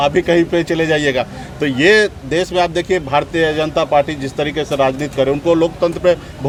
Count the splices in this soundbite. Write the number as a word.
zero